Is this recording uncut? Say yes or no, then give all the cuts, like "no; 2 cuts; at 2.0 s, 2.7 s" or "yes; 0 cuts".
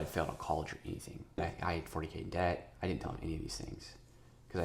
no; 1 cut; at 1.4 s